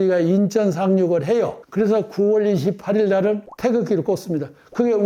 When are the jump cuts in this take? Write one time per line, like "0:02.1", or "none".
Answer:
0:03.5